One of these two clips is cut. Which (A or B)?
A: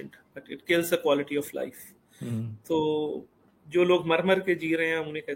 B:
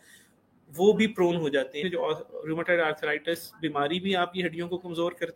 B